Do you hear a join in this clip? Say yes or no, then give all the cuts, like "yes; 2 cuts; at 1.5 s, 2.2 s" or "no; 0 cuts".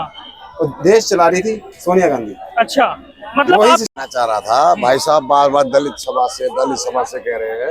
yes; 1 cut; at 3.9 s